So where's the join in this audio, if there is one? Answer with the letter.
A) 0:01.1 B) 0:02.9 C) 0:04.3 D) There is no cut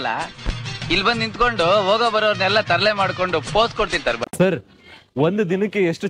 C